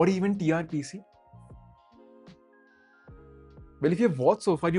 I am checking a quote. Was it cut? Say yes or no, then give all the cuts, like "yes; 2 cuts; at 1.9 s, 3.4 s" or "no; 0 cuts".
no; 0 cuts